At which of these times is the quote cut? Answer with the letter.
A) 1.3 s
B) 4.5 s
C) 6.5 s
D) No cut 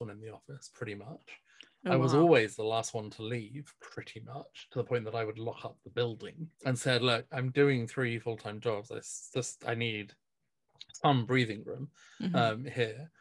C